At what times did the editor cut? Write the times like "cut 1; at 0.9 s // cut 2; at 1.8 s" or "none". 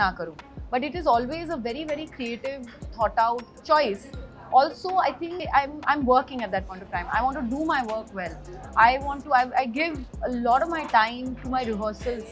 none